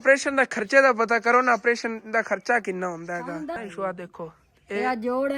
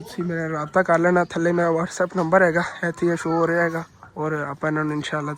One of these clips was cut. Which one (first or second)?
first